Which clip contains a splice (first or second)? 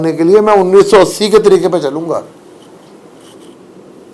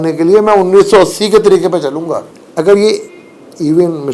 second